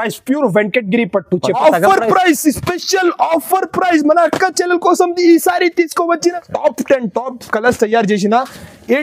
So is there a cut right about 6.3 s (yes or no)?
yes